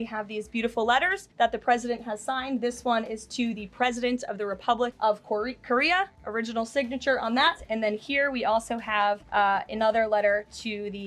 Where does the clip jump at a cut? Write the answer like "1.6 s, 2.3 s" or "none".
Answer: 1.2 s, 4.9 s, 6.2 s, 7.6 s, 9.2 s